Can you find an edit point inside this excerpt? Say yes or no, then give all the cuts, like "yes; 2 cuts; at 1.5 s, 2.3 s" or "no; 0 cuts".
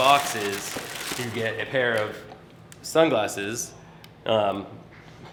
no; 0 cuts